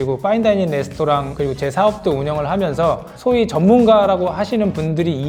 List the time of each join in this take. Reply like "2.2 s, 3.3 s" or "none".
1.3 s, 3.1 s